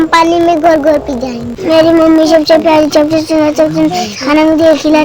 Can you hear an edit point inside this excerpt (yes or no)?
yes